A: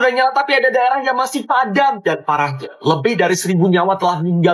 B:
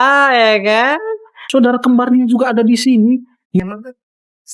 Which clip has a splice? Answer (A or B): B